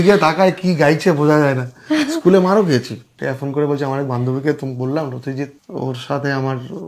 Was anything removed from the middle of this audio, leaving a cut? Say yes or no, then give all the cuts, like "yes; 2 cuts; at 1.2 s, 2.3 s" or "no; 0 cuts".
yes; 2 cuts; at 3.2 s, 5.6 s